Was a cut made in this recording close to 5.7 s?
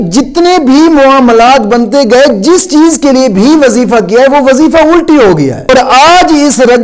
yes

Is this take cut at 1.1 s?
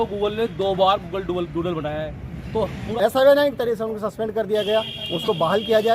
no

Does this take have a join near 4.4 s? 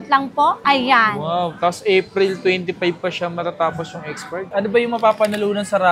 yes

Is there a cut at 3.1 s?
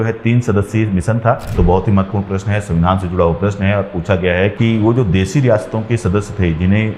no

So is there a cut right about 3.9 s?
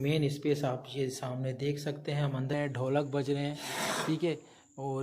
no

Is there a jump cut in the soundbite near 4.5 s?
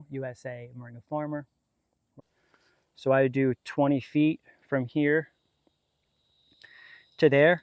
no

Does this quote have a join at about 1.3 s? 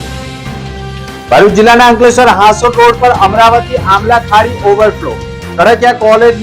yes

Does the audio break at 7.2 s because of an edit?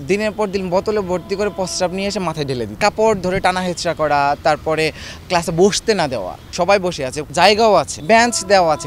yes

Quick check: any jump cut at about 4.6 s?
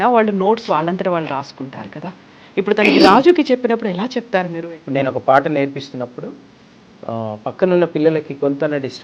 yes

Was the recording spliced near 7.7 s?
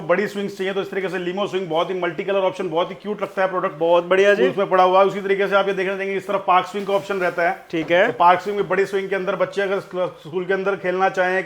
no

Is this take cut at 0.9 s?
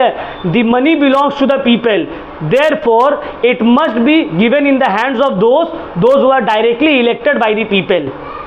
no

